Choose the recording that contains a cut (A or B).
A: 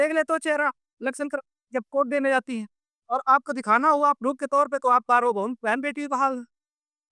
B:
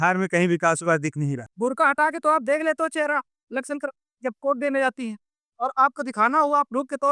B